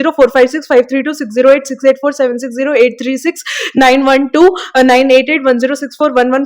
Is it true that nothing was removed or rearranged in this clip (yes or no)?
yes